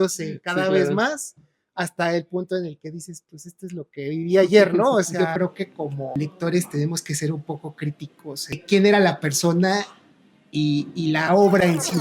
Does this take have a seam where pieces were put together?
yes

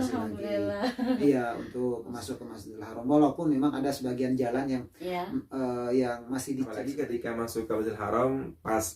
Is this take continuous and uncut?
no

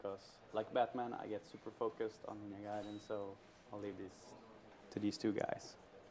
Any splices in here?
yes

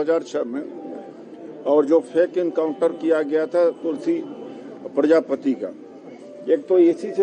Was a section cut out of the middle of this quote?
no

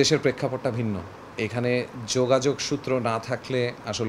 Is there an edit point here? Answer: no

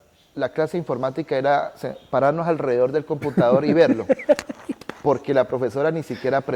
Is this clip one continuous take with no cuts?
yes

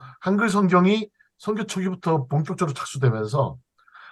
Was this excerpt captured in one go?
yes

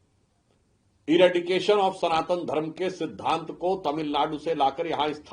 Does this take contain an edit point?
no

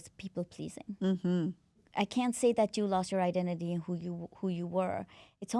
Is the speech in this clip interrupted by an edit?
yes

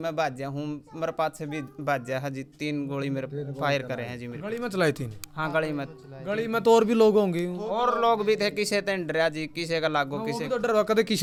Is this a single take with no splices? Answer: yes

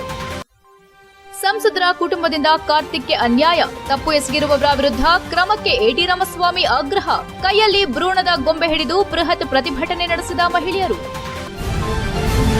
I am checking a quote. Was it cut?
yes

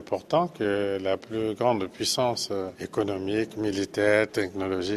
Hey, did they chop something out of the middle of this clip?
no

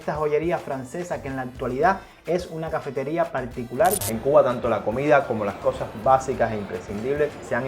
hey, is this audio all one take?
no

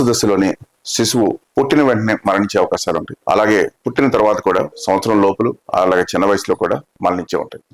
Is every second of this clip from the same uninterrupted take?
no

